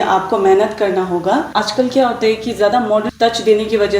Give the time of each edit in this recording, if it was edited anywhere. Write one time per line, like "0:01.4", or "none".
0:01.6
0:03.0

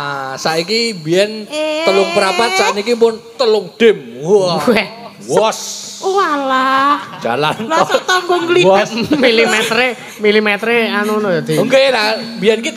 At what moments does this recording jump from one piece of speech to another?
none

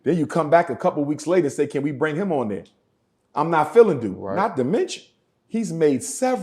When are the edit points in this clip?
0:02.8

